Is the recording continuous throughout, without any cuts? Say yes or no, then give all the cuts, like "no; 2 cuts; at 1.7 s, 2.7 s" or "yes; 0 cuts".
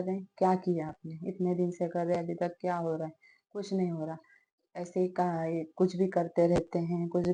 yes; 0 cuts